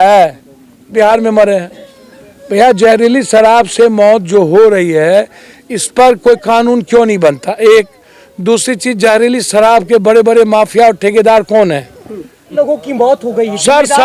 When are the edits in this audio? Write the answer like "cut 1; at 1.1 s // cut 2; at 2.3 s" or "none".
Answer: cut 1; at 0.9 s // cut 2; at 12.5 s